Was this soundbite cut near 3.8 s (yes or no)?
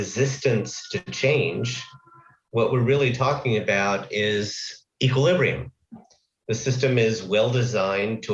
no